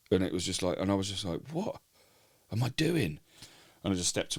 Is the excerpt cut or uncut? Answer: uncut